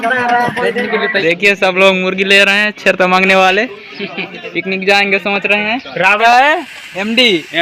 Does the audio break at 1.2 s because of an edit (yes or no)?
yes